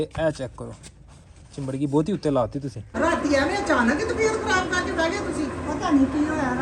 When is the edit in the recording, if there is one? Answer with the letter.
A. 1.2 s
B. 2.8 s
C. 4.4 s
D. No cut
B